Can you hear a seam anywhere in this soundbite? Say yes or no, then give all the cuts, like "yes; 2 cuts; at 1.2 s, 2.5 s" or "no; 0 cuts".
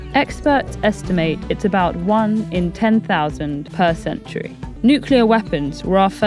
yes; 2 cuts; at 3.7 s, 4.6 s